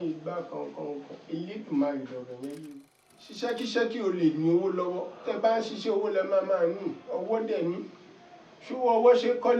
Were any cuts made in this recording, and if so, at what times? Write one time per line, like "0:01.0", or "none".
0:02.6